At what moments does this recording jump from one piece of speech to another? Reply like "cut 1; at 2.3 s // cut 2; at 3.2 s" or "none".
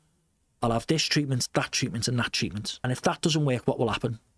cut 1; at 2.9 s